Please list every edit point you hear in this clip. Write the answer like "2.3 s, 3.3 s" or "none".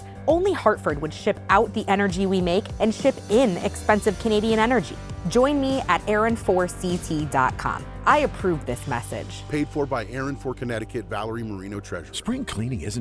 12.0 s